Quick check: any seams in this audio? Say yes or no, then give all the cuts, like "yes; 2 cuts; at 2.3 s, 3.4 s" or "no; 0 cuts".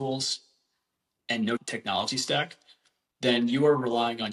yes; 1 cut; at 1.6 s